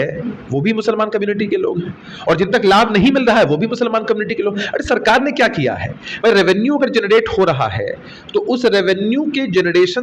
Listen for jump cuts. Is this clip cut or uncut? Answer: uncut